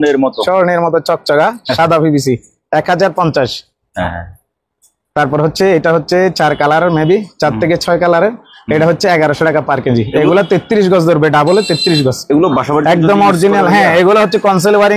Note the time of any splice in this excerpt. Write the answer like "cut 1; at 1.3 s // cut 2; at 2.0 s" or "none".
none